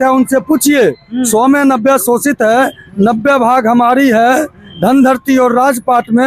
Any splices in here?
no; 0 cuts

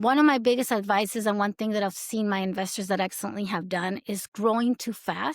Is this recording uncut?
yes; 0 cuts

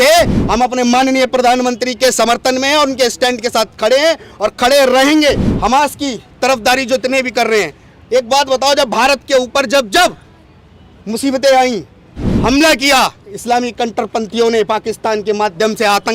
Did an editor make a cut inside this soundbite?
yes; 1 cut; at 5.5 s

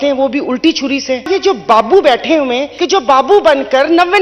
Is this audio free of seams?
no; 2 cuts; at 1.3 s, 2.7 s

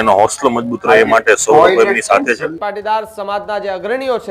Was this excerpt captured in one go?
no; 1 cut; at 2.5 s

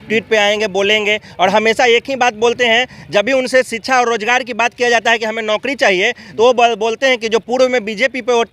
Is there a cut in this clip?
no; 0 cuts

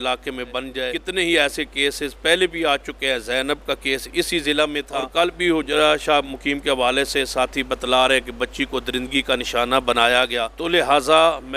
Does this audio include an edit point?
yes; 3 cuts; at 0.9 s, 5.0 s, 10.5 s

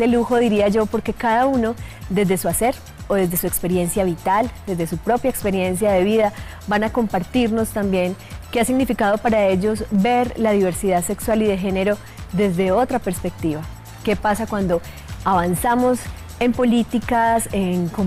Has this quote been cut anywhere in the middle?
no; 0 cuts

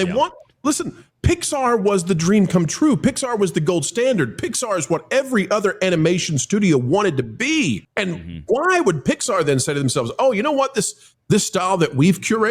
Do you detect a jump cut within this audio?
yes; 1 cut; at 7.9 s

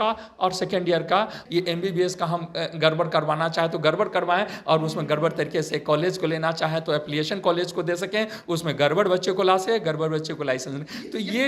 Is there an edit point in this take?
yes; 1 cut; at 1.4 s

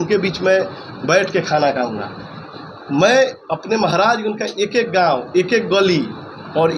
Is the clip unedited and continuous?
yes; 0 cuts

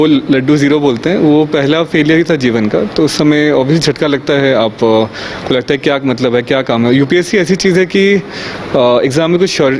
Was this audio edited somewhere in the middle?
no; 0 cuts

